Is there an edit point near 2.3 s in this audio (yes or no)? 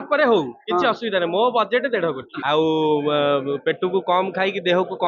yes